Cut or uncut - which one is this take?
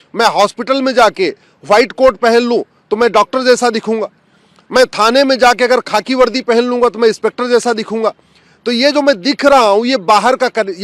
uncut